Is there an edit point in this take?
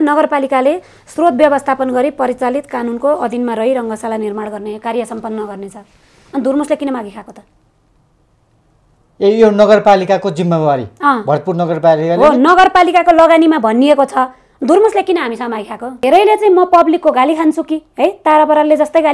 yes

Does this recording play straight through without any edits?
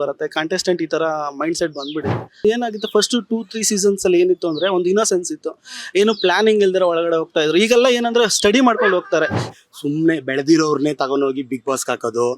no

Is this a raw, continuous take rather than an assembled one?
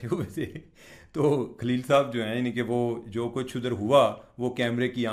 yes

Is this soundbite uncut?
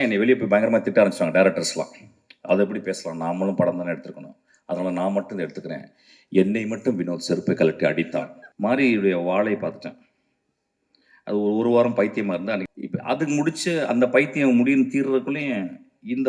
no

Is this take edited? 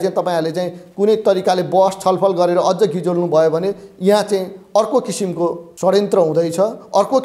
yes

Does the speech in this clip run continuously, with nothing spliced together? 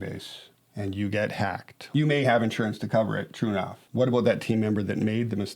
no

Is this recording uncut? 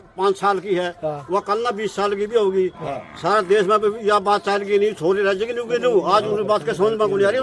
yes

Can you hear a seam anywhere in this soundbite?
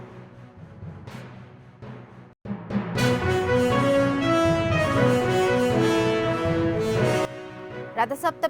no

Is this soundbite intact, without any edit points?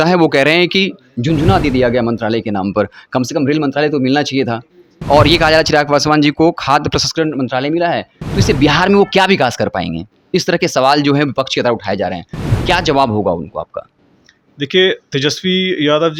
yes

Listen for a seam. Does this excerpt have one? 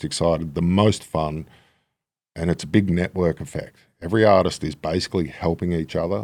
no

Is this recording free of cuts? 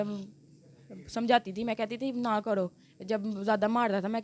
yes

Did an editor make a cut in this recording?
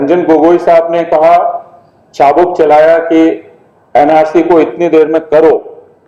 no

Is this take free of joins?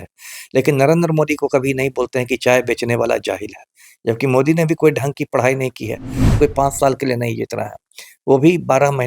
no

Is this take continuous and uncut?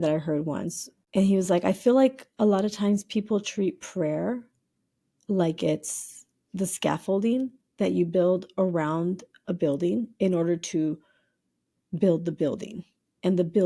no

